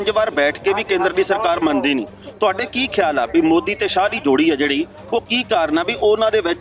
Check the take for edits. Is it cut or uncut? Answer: uncut